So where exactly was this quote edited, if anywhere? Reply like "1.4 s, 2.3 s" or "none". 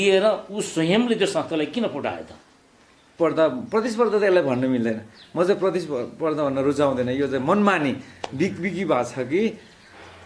3.1 s